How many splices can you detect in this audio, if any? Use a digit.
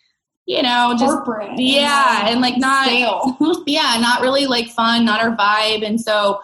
0